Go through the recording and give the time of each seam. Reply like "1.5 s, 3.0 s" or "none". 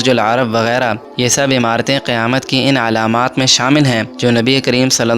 1.0 s, 4.1 s